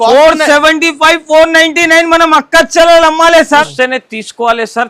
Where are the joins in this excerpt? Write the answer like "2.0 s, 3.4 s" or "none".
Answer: 3.7 s

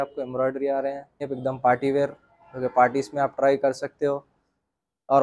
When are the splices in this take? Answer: 1.3 s

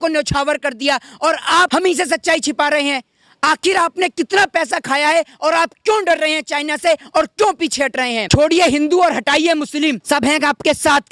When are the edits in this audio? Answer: 1.7 s, 8.2 s, 10.0 s

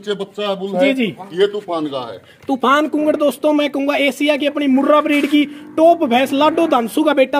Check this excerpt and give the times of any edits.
none

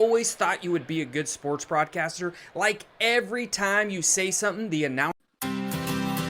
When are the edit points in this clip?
5.2 s

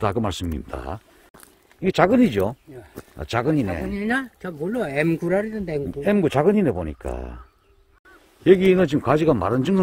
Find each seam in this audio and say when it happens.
1.1 s, 8.2 s

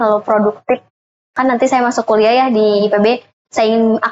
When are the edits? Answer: 1.3 s

